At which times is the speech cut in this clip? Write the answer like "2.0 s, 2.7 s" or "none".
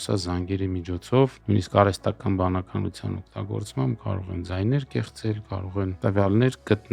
1.4 s, 5.9 s